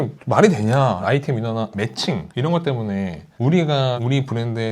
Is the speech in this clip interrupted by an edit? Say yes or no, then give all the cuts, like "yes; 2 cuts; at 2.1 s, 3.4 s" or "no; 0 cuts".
yes; 3 cuts; at 1.0 s, 2.3 s, 3.2 s